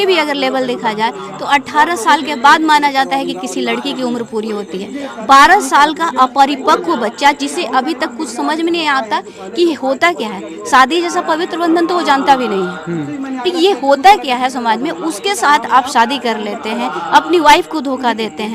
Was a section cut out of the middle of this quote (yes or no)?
no